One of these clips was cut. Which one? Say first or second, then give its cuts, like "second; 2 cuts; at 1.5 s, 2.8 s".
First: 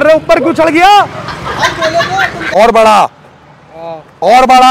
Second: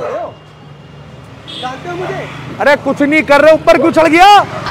first; 1 cut; at 2.4 s